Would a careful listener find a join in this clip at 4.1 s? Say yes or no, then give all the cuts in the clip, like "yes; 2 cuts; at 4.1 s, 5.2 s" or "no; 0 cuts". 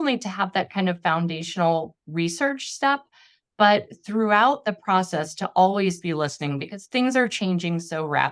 no; 0 cuts